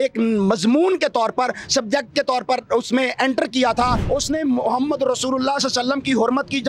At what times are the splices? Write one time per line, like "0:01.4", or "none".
0:04.0